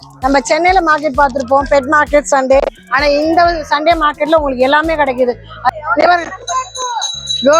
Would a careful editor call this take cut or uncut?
cut